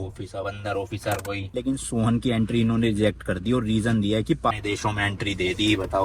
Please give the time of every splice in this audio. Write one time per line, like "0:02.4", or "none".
0:01.6
0:04.5